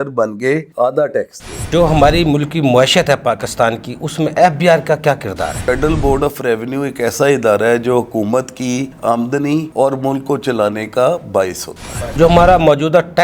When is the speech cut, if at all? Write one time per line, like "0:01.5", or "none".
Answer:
0:01.7
0:05.6
0:12.1